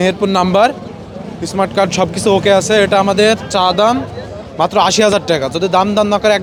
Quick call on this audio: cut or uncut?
uncut